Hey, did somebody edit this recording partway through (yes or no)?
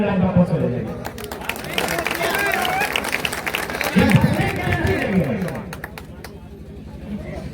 no